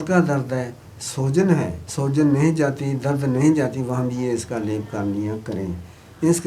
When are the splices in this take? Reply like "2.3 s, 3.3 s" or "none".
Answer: 1.8 s